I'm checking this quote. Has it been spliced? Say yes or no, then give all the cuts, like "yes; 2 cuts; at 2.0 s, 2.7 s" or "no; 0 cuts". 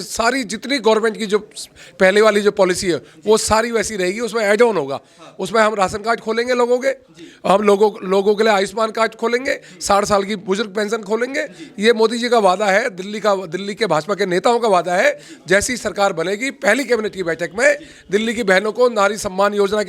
no; 0 cuts